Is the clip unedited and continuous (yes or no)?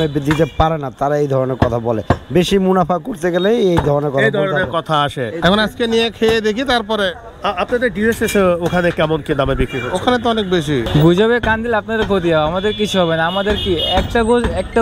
no